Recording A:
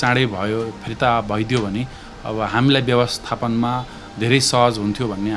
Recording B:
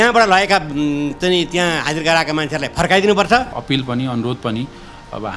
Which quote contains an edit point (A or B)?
B